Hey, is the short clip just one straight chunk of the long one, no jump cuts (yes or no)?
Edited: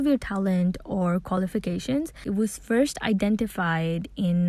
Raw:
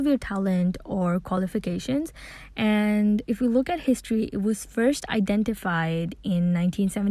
no